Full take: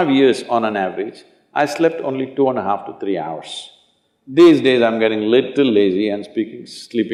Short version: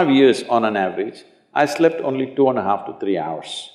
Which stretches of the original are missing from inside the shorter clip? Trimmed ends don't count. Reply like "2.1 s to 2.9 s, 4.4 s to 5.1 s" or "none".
none